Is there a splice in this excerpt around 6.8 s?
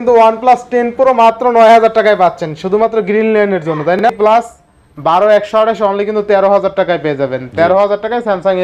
no; 1 cut; at 4.0 s

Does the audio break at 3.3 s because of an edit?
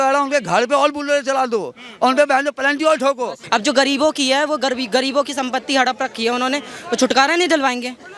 yes; 1 cut; at 3.3 s

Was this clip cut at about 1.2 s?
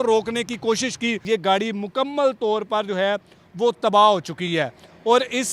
yes; 1 cut; at 1.2 s

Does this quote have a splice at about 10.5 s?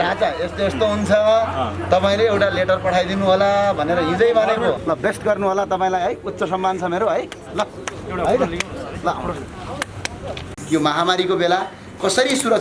yes; 2 cuts; at 4.8 s, 10.5 s

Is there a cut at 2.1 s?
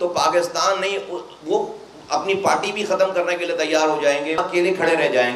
no; 1 cut; at 4.4 s

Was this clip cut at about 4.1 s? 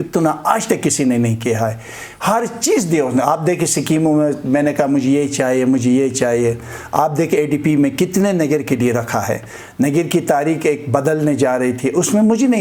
no; 0 cuts

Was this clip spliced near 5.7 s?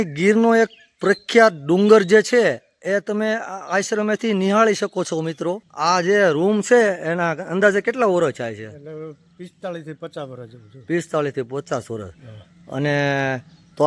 yes; 1 cut; at 5.7 s

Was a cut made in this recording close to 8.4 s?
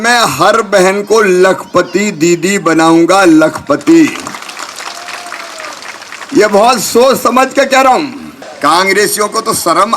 yes; 1 cut; at 8.4 s

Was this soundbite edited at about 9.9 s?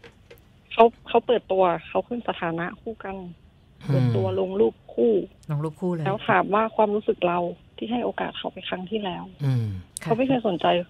yes; 1 cut; at 9.9 s

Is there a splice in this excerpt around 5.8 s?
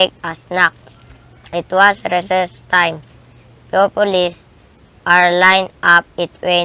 yes; 1 cut; at 5.8 s

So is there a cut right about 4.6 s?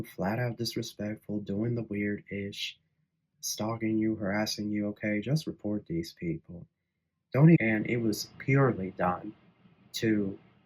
no; 1 cut; at 7.6 s

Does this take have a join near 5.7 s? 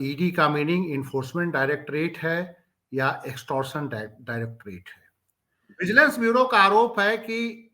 yes; 1 cut; at 5.7 s

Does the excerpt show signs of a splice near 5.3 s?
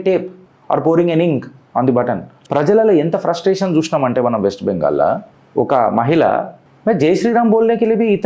no; 2 cuts; at 2.3 s, 6.6 s

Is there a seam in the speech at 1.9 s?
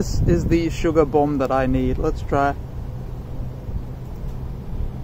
no; 0 cuts

